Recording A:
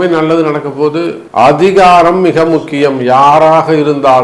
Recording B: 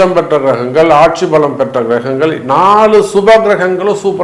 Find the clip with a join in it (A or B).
A